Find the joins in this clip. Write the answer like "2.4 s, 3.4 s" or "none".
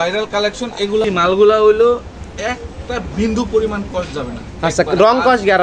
1.0 s